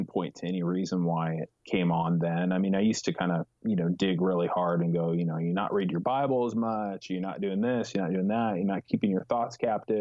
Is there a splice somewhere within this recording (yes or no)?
no